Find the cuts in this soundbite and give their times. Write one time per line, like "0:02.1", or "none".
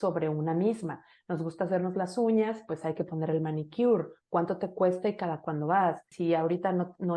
0:06.1